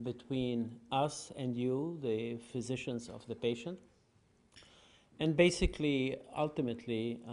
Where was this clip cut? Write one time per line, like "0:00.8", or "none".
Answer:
0:01.3